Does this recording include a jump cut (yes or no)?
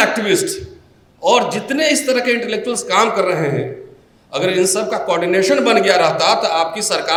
no